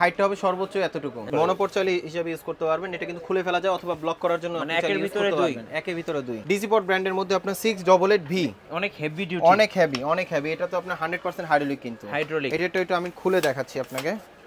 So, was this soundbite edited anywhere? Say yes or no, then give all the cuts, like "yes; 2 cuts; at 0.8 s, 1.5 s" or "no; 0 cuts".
yes; 2 cuts; at 1.2 s, 6.4 s